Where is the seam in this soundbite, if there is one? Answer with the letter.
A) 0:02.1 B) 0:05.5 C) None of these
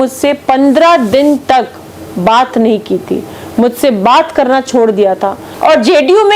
B